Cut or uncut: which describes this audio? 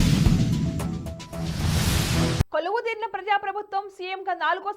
uncut